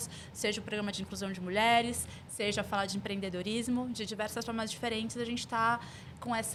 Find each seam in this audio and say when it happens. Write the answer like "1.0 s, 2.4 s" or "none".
none